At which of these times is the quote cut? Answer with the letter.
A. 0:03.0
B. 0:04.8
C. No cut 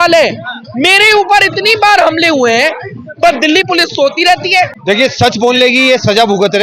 B